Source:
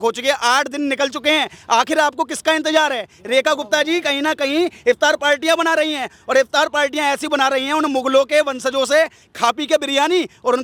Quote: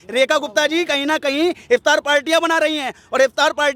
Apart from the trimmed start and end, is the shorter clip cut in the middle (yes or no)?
no